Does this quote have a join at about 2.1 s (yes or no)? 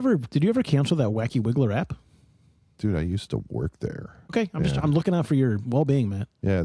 no